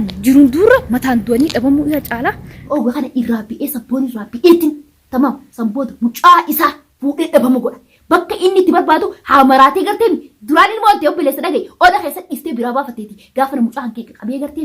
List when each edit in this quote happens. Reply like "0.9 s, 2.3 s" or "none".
2.7 s